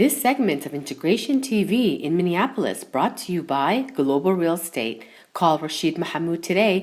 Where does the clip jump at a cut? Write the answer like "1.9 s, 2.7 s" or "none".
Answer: none